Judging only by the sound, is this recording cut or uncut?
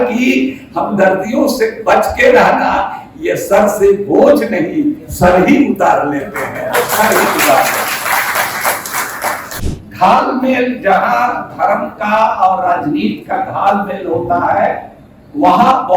cut